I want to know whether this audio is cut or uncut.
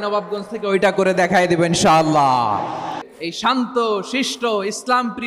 cut